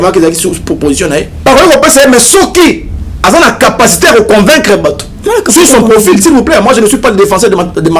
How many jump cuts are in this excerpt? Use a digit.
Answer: 1